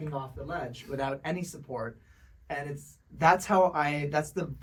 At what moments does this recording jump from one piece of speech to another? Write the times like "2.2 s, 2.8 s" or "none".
none